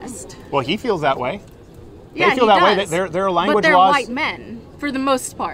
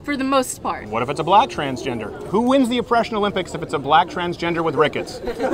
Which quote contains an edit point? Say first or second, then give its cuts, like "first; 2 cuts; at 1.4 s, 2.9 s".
second; 1 cut; at 2.2 s